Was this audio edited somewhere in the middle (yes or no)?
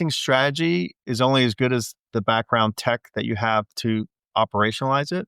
yes